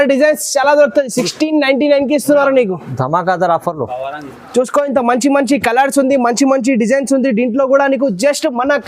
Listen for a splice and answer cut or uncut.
uncut